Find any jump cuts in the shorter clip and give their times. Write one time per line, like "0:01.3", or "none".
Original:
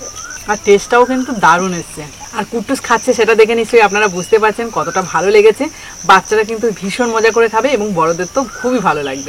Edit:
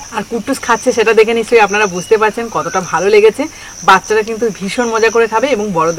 none